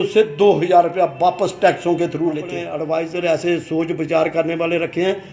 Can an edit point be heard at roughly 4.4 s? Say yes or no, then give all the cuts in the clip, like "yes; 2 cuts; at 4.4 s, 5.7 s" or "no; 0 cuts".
no; 1 cut; at 2.7 s